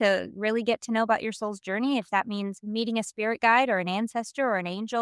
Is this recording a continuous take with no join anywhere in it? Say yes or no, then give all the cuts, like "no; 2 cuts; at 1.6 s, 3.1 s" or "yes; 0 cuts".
yes; 0 cuts